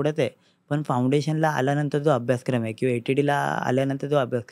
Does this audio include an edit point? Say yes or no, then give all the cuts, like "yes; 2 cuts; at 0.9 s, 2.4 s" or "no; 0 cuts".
no; 0 cuts